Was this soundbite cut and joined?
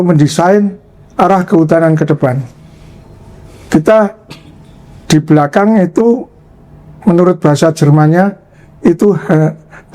no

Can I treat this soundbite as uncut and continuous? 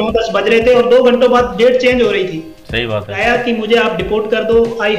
no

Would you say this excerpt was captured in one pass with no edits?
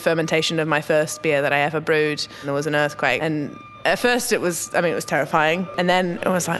no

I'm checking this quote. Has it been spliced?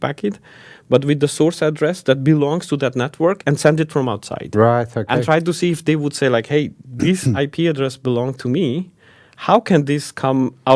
no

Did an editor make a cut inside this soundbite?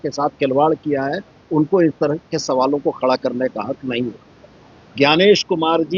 no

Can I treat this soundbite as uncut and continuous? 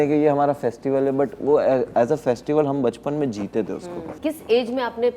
no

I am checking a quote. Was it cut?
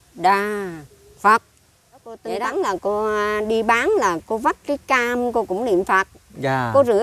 yes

